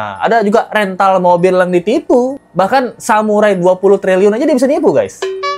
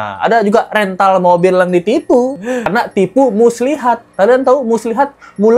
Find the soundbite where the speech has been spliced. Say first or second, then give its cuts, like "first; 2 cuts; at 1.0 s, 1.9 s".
second; 1 cut; at 2.4 s